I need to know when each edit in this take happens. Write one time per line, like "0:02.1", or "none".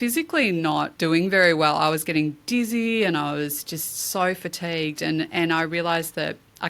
0:00.9